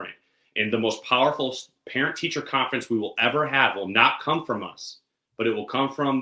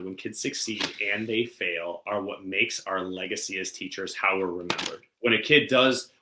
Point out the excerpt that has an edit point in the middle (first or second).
second